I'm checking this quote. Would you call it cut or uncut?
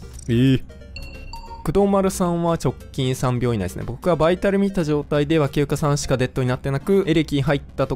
cut